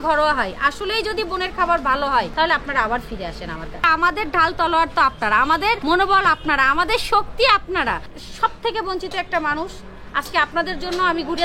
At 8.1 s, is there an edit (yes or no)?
yes